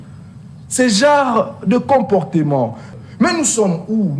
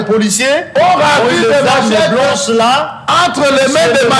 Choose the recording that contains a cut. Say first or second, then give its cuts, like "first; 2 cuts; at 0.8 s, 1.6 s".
first; 1 cut; at 2.9 s